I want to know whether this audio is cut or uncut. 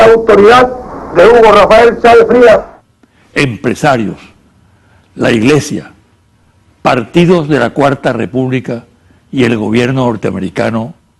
uncut